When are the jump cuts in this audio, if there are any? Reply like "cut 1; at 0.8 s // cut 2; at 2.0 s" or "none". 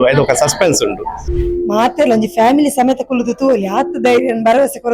cut 1; at 1.3 s